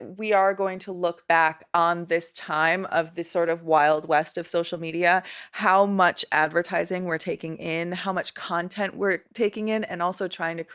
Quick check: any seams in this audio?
no; 0 cuts

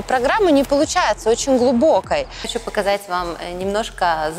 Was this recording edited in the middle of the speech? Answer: yes; 1 cut; at 2.5 s

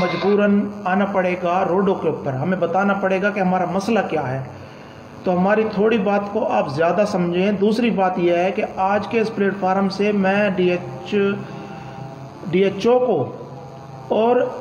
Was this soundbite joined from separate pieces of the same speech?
no; 0 cuts

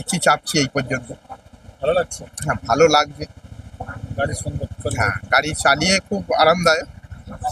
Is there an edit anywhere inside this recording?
no; 0 cuts

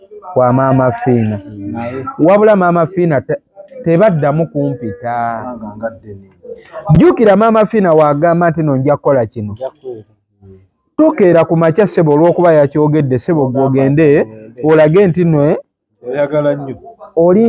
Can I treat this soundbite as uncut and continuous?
yes; 0 cuts

